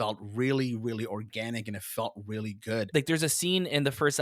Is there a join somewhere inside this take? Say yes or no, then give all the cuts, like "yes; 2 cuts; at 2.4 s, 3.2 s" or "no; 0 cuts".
yes; 1 cut; at 2.9 s